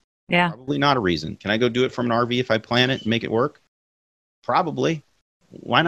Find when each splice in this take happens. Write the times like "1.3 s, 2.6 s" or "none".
1.4 s